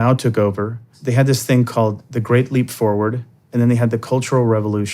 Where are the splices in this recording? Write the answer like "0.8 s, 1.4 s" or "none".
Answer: 1.0 s